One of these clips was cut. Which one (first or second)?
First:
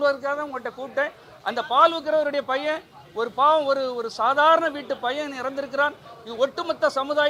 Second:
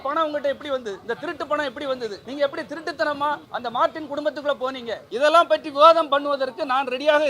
second